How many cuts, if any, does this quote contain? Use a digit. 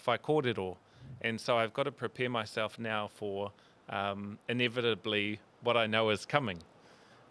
0